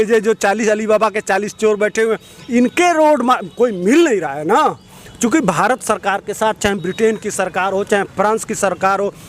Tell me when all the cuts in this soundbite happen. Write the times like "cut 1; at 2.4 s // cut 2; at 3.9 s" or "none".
none